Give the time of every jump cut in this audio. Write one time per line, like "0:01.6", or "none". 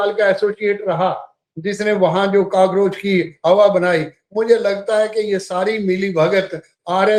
none

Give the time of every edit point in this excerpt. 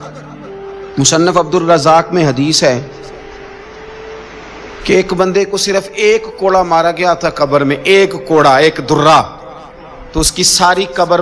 none

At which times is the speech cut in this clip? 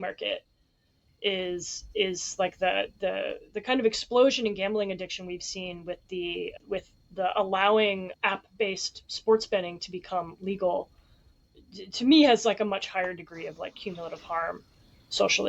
0:06.5
0:08.1

